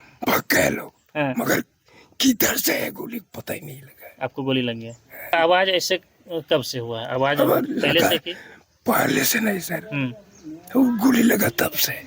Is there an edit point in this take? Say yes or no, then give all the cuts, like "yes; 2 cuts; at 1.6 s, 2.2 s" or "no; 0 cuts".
yes; 1 cut; at 5.3 s